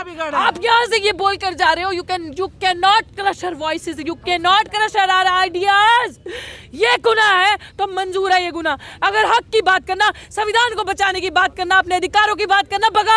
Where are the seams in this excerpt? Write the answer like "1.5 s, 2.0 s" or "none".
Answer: none